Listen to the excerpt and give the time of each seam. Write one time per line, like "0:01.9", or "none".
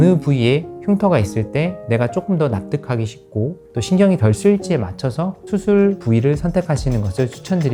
none